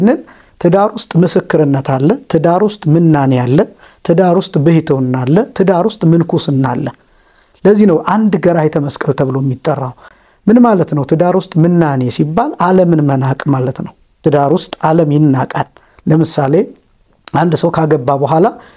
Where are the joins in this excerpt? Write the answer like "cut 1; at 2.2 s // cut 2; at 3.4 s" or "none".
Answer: none